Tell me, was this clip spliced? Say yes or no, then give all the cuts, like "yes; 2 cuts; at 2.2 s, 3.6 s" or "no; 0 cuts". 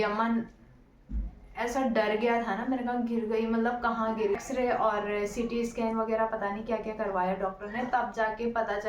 yes; 1 cut; at 4.4 s